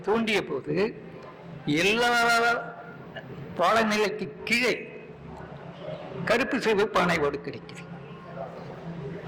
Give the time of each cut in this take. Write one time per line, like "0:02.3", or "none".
none